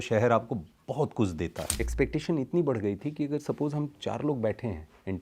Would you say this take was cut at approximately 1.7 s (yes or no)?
yes